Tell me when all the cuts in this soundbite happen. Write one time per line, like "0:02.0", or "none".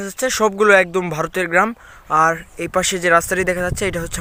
none